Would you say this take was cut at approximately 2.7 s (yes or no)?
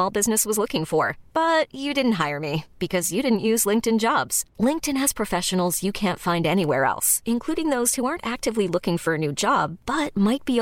no